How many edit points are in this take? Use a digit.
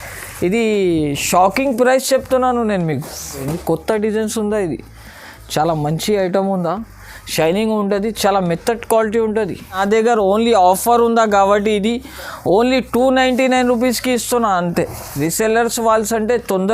3